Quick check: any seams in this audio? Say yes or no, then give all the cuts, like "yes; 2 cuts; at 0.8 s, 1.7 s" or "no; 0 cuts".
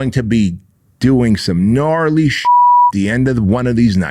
no; 0 cuts